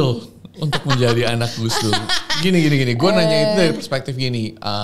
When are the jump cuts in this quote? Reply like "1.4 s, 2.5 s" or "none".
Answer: none